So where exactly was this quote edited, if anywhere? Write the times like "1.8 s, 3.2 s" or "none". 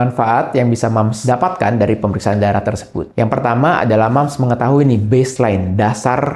1.2 s